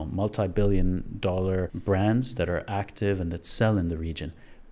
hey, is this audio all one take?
no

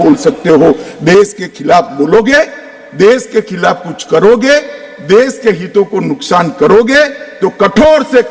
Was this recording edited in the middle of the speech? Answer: no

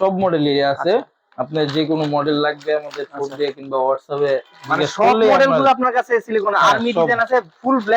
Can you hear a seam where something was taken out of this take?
no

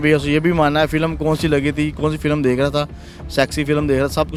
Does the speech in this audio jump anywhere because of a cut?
no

